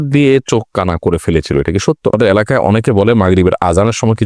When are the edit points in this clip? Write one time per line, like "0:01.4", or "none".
0:02.1